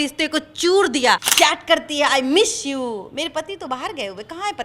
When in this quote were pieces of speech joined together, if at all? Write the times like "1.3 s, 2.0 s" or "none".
1.3 s